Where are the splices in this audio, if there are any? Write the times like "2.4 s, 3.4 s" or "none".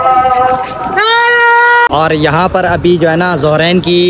1.9 s